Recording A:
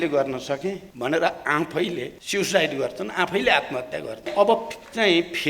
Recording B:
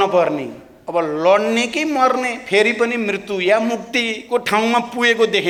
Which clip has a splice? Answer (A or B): A